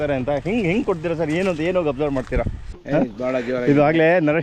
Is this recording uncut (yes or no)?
no